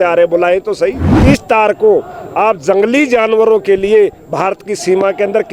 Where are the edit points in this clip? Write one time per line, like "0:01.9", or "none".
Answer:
0:01.1